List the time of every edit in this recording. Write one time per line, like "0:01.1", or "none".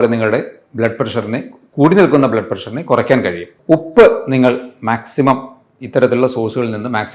0:03.5